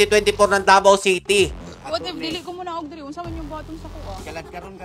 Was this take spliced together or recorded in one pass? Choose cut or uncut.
cut